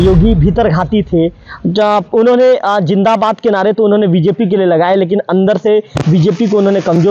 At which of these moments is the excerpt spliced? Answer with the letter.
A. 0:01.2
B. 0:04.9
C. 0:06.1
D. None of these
D